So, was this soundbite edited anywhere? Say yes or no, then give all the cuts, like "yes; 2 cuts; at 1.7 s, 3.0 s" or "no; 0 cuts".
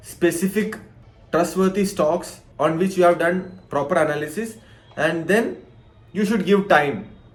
no; 0 cuts